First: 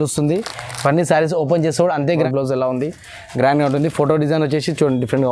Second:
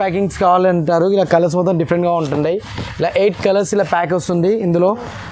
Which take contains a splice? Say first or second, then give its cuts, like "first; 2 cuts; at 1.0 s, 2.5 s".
first; 1 cut; at 2.1 s